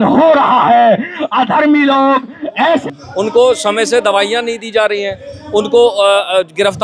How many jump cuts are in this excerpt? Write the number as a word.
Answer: one